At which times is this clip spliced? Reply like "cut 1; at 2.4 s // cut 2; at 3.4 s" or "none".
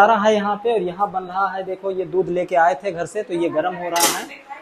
none